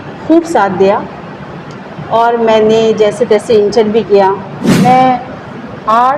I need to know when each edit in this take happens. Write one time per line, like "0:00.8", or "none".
0:04.8